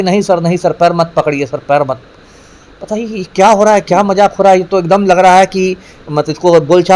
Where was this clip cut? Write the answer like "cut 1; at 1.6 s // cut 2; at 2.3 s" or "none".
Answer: none